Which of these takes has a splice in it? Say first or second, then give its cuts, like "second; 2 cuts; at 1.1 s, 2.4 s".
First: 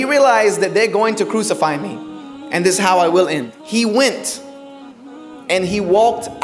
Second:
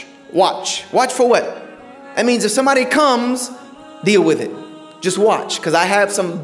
first; 1 cut; at 3.5 s